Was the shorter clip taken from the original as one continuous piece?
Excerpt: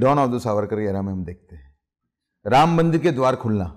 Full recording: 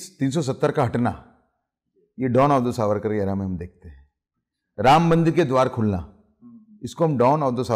yes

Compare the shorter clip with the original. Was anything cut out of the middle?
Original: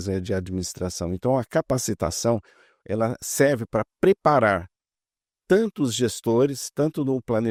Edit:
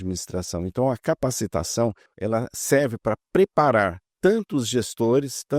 yes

